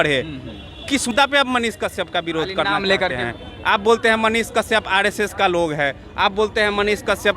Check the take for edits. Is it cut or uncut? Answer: cut